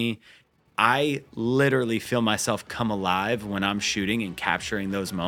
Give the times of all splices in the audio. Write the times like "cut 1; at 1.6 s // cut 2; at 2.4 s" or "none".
none